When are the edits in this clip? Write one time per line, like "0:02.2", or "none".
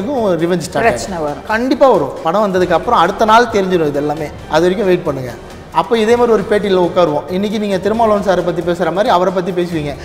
0:02.2
0:04.3